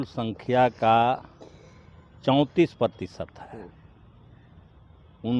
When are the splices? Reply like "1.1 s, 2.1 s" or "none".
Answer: none